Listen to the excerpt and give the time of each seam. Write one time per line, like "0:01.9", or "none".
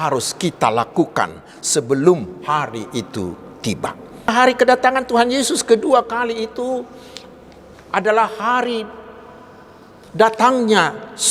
0:04.3